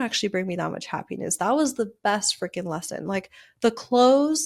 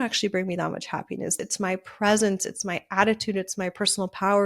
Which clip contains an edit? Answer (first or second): second